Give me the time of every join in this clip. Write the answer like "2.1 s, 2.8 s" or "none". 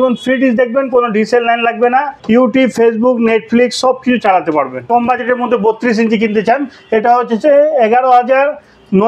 2.1 s, 4.9 s